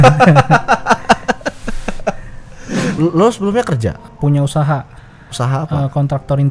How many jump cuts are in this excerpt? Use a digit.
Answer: 2